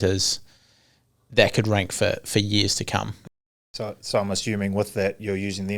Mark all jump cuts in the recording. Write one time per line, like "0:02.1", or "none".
0:03.5